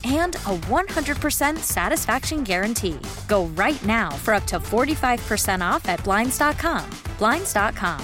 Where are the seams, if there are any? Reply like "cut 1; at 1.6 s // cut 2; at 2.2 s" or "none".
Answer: none